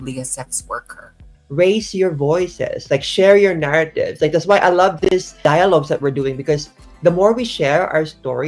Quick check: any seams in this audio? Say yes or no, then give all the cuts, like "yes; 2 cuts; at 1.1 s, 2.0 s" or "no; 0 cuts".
yes; 1 cut; at 1.3 s